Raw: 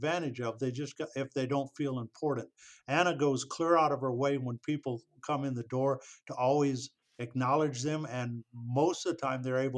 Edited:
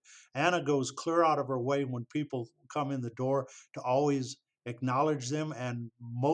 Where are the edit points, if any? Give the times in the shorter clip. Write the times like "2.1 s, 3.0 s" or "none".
none

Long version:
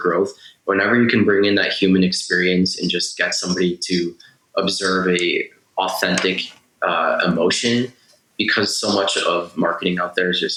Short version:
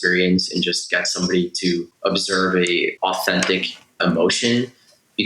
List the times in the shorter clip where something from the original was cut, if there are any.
1.9 s, 2.9 s, 4.0 s

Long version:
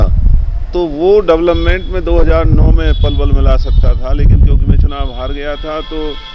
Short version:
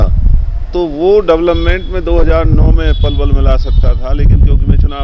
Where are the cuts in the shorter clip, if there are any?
none

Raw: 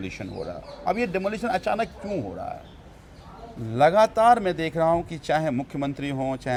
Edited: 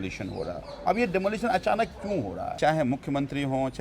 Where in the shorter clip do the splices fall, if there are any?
2.6 s

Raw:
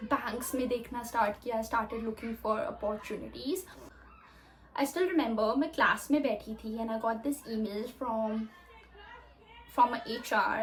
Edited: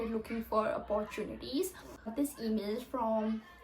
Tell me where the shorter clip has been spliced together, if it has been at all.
2.1 s

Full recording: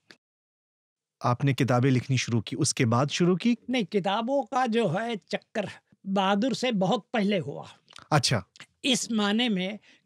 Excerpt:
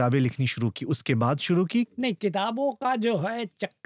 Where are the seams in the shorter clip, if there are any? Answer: none

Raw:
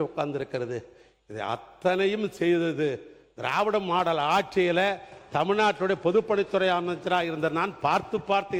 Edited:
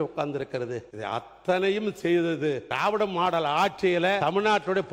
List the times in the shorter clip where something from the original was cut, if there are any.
0.9 s, 2.7 s, 4.2 s

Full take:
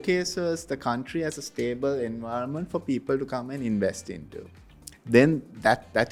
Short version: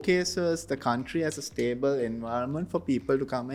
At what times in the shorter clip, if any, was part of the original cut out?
none

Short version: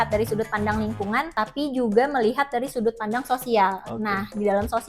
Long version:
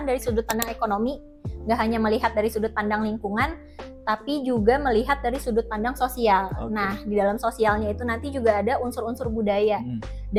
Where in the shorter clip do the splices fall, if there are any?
1.3 s

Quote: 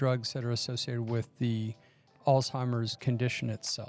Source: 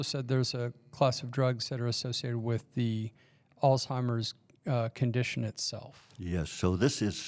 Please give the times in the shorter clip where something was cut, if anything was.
3.0 s

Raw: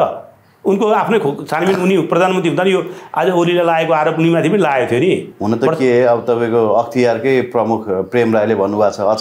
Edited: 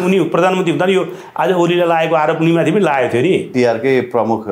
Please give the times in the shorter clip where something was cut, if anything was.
3.5 s

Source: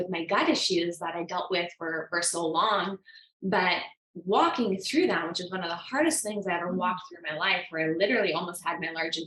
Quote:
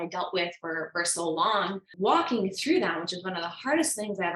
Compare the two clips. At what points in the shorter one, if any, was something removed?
1.8 s

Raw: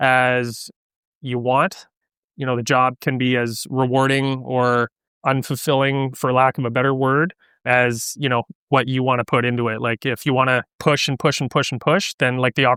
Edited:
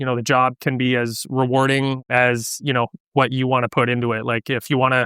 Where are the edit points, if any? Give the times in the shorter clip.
2.0 s

